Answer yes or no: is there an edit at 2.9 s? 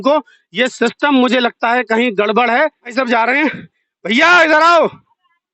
yes